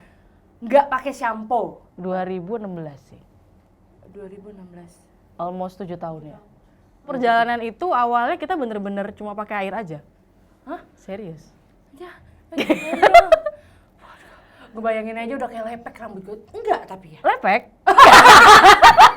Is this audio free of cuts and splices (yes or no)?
no